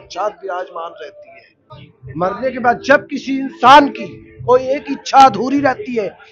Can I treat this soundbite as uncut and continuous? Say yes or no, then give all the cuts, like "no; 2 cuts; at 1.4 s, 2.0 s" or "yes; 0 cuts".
no; 1 cut; at 1.5 s